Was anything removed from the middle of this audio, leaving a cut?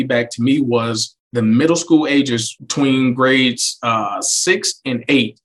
no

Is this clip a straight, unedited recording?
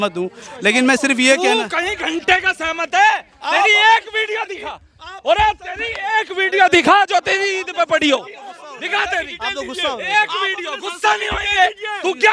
yes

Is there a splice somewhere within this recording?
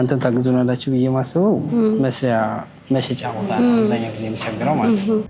no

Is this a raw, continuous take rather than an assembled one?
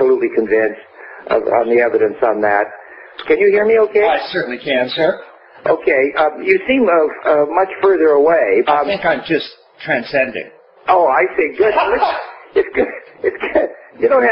no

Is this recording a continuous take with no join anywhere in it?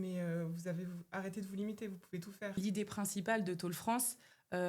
no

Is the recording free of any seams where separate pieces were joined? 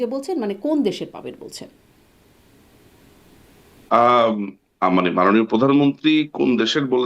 yes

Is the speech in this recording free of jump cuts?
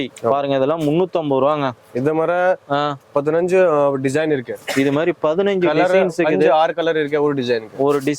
yes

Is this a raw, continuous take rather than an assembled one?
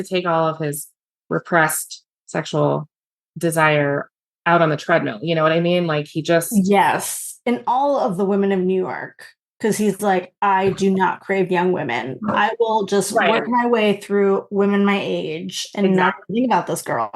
yes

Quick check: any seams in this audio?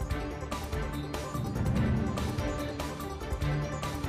no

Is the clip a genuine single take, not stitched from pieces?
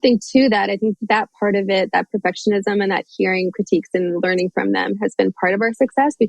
no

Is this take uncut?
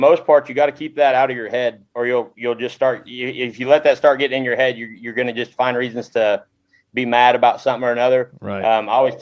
no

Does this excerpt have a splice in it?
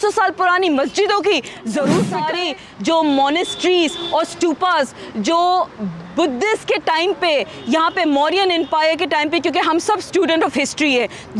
yes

